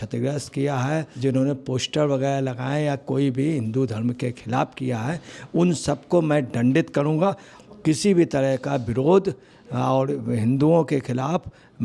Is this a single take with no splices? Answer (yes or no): no